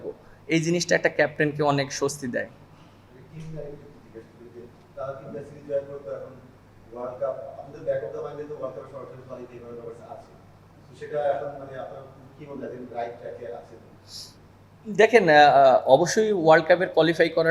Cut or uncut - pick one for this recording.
uncut